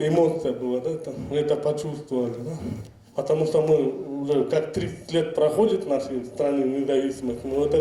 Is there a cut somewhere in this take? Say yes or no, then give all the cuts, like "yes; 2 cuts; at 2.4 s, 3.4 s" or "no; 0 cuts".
no; 0 cuts